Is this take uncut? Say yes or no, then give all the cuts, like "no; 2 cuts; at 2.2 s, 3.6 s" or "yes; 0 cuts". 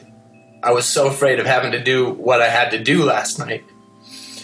yes; 0 cuts